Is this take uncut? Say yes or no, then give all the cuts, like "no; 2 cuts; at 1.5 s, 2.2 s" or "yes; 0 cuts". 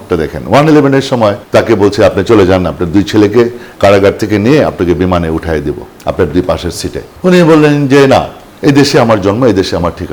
yes; 0 cuts